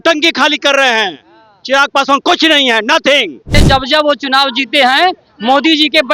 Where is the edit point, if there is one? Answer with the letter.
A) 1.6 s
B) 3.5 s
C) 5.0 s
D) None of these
B